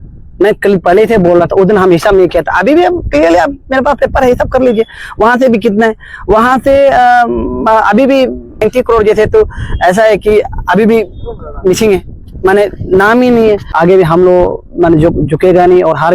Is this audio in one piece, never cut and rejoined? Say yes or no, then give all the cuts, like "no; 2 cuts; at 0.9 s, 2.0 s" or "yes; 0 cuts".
no; 2 cuts; at 8.6 s, 13.7 s